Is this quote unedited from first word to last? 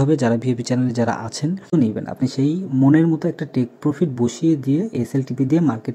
no; 1 cut; at 1.7 s

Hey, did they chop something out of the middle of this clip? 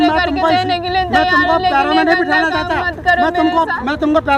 no; 0 cuts

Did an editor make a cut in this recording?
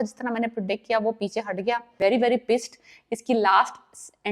yes; 1 cut; at 1.9 s

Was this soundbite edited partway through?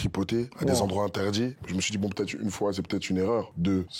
no; 0 cuts

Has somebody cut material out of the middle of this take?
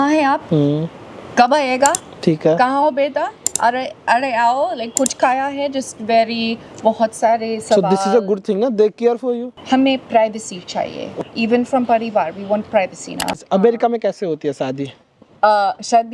yes; 3 cuts; at 9.5 s, 11.2 s, 13.3 s

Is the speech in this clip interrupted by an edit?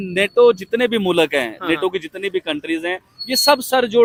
no; 0 cuts

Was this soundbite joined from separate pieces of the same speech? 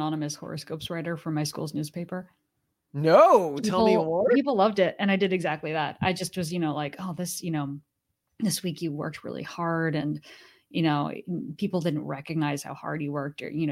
no; 0 cuts

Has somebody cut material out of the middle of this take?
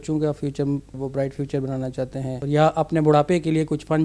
yes; 2 cuts; at 1.0 s, 2.4 s

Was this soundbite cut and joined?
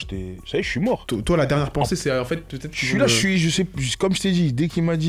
no; 0 cuts

